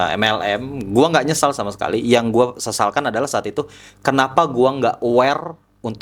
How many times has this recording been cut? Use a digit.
0